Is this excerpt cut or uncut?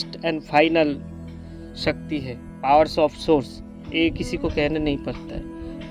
uncut